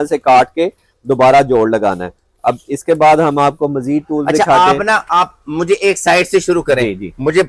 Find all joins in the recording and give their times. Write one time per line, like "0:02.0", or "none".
none